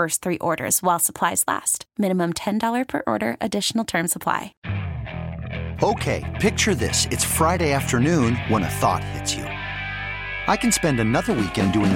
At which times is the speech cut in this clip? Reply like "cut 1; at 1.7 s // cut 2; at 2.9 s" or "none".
cut 1; at 4.6 s